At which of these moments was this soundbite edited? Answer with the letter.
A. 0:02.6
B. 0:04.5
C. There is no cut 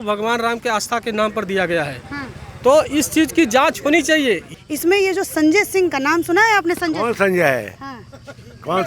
B